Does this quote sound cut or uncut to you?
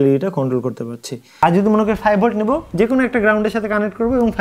cut